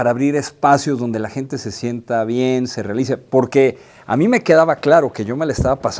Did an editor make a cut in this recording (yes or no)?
no